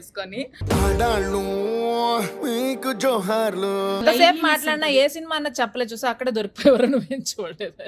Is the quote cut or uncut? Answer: cut